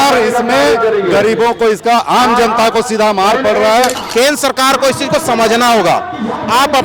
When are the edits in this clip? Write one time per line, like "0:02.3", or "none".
0:04.0